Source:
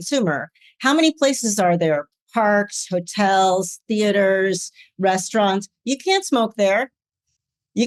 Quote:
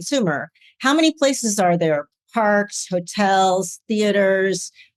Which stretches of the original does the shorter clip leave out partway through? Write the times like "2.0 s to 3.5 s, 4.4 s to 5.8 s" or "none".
none